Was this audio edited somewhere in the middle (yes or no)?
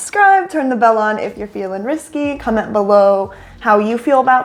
no